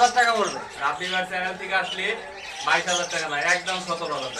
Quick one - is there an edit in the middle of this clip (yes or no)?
no